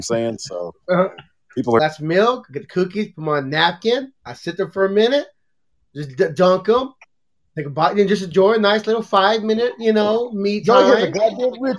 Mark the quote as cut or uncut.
cut